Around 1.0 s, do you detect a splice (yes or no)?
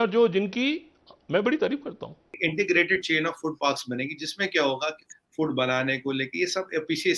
no